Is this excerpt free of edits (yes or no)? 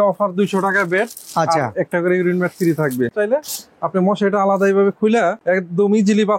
no